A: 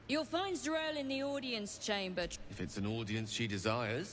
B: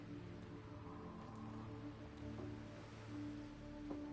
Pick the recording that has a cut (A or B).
A